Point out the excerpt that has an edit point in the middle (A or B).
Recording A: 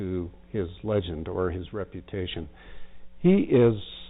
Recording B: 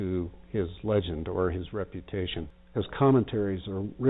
B